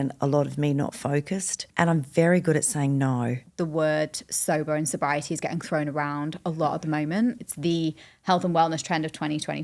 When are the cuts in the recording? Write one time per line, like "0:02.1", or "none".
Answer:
0:01.7
0:03.4
0:07.4